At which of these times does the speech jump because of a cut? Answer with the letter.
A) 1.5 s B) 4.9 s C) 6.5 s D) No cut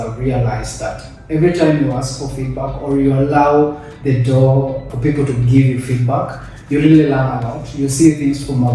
B